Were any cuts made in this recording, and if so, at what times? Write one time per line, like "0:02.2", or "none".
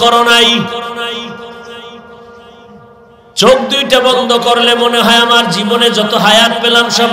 none